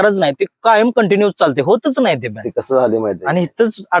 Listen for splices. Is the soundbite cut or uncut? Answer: uncut